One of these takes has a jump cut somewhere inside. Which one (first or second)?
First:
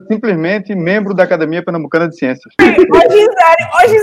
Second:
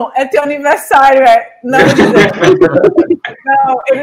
first